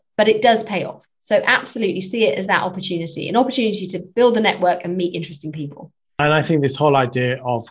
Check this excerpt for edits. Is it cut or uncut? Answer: uncut